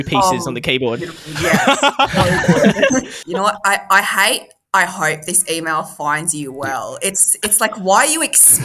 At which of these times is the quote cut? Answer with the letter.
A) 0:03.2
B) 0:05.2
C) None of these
A